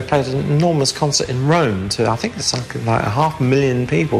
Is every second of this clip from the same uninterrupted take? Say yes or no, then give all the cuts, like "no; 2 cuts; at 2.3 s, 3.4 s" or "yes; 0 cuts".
yes; 0 cuts